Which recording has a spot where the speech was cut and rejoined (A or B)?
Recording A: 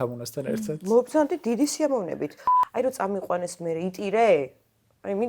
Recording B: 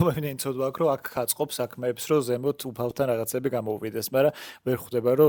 A